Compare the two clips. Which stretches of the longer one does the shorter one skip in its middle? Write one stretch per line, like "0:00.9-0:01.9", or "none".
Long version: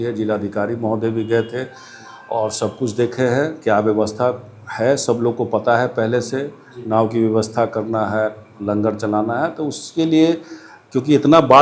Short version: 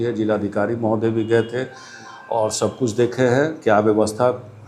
none